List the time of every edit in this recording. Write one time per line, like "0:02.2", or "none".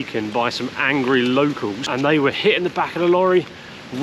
0:01.8